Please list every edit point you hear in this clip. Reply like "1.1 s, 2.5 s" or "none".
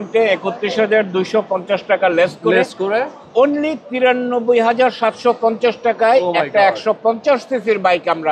none